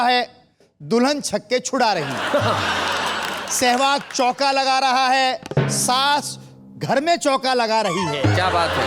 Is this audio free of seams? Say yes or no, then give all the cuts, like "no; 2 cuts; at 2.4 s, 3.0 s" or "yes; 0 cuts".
yes; 0 cuts